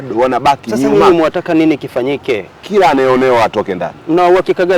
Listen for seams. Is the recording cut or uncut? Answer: cut